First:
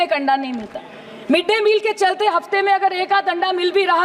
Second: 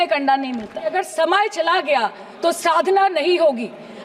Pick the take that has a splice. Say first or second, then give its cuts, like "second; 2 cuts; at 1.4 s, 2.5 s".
second; 1 cut; at 0.9 s